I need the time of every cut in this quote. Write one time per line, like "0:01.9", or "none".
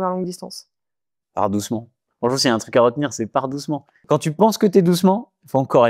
0:03.9